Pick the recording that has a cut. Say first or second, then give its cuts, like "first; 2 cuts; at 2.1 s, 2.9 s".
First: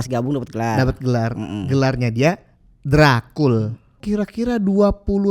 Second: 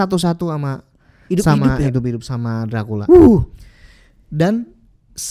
first; 1 cut; at 4.0 s